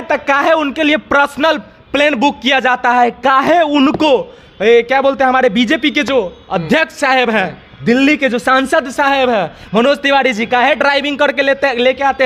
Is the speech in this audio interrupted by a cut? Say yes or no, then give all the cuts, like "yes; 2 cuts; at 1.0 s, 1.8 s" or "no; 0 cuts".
no; 0 cuts